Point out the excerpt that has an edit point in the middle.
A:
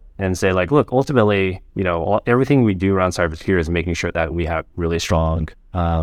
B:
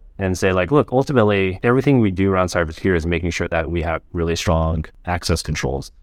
B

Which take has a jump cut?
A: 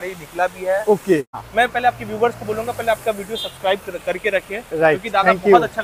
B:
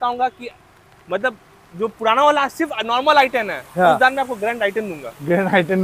A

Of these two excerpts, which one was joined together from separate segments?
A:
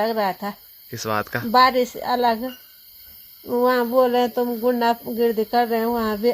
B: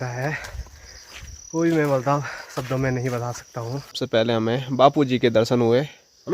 B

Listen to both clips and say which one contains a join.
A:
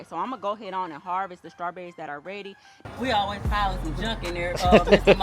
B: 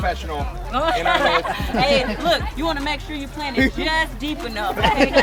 A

